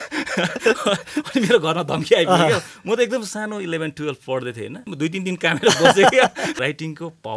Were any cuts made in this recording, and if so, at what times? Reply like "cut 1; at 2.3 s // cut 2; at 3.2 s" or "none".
cut 1; at 4.9 s // cut 2; at 6.5 s

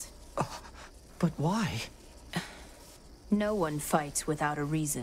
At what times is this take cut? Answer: cut 1; at 1.0 s

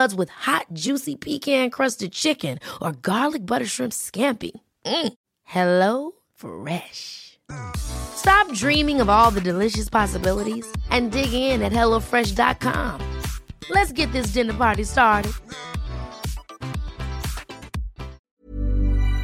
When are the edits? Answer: cut 1; at 18.3 s

